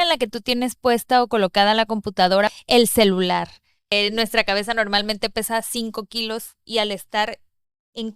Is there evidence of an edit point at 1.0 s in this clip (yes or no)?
no